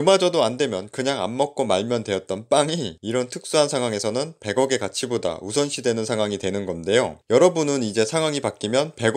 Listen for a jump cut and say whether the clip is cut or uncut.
uncut